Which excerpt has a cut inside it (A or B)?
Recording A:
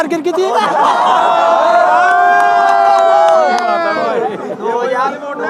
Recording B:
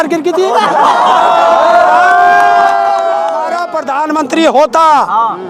B